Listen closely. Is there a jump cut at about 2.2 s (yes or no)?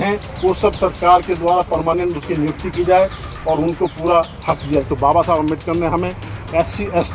no